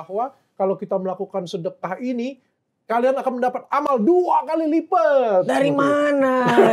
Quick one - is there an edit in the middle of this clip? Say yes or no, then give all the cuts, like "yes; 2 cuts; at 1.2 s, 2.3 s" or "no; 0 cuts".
no; 0 cuts